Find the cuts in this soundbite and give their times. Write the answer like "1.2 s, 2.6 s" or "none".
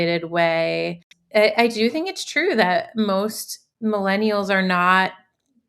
1.1 s